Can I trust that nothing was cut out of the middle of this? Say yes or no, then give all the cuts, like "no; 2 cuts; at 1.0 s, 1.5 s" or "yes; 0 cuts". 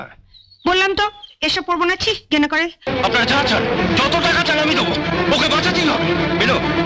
no; 1 cut; at 2.9 s